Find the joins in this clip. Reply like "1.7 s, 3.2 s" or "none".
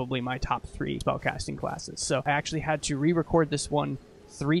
1.0 s, 2.2 s